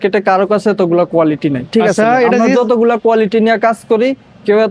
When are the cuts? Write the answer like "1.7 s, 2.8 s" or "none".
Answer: none